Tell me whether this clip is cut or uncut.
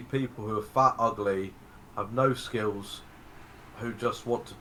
uncut